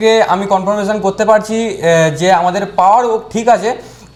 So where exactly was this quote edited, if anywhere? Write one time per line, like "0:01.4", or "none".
none